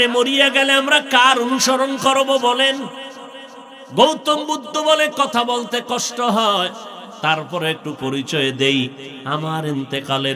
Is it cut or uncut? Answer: uncut